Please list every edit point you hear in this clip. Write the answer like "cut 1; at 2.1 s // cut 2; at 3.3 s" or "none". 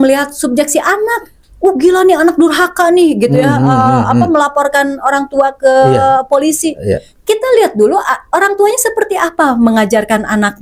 none